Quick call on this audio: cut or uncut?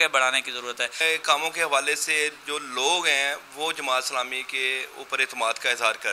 cut